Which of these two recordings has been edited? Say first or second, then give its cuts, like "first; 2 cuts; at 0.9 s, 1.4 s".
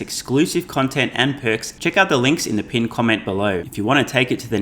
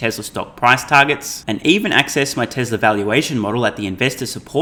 first; 2 cuts; at 1.7 s, 3.7 s